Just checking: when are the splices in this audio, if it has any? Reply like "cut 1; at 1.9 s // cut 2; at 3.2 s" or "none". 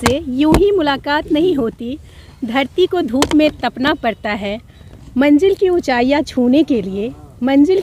none